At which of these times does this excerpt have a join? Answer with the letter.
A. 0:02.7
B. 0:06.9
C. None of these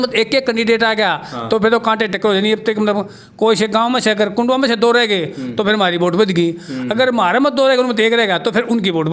C